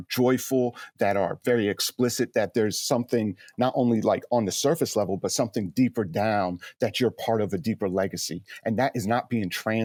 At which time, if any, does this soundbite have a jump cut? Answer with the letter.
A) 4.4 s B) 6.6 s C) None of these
C